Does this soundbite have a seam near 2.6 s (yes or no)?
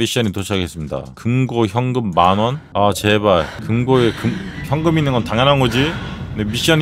yes